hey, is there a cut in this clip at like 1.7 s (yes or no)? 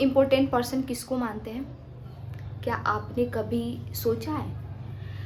no